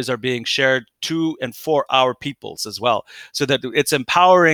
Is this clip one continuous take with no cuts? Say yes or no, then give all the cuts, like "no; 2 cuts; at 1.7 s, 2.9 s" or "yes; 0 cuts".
yes; 0 cuts